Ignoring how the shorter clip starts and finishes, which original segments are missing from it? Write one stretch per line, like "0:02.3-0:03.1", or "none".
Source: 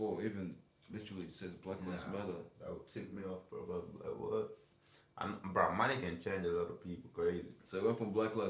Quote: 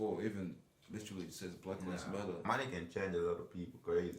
0:02.5-0:05.8